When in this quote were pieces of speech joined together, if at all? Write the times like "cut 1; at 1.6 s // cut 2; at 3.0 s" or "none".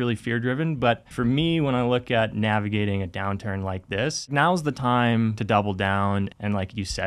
cut 1; at 1.1 s // cut 2; at 4.3 s // cut 3; at 5.4 s // cut 4; at 6.3 s